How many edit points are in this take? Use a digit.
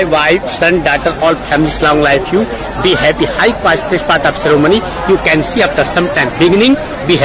0